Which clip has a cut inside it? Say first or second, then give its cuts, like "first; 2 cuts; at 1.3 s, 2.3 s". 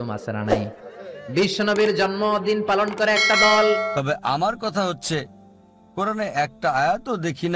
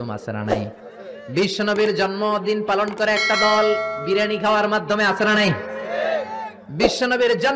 first; 1 cut; at 3.9 s